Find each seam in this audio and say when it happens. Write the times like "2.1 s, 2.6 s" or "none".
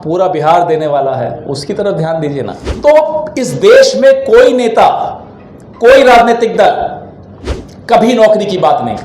2.6 s